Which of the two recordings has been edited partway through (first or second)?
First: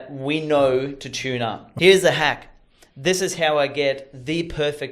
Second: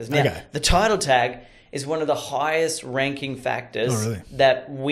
first